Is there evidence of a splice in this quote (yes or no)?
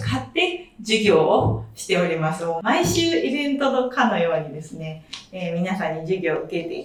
no